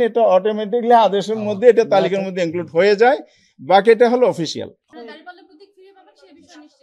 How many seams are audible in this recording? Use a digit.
1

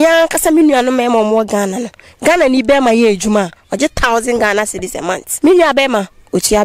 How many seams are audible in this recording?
1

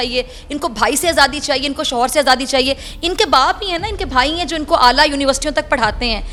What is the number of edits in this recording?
0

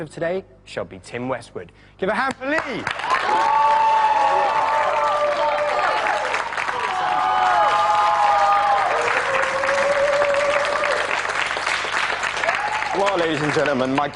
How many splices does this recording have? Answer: 1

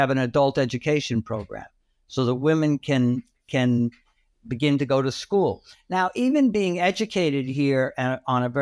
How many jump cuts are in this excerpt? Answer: 0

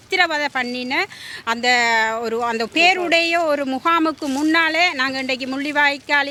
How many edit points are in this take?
0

